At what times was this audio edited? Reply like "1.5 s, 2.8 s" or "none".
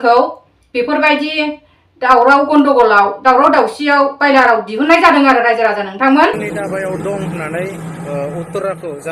6.4 s